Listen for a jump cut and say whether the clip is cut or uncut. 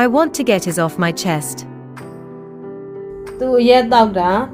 cut